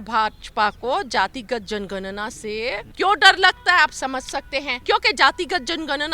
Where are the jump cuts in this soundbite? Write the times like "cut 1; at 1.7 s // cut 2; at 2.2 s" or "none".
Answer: cut 1; at 2.9 s // cut 2; at 4.7 s